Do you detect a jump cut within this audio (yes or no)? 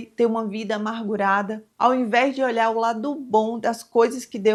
no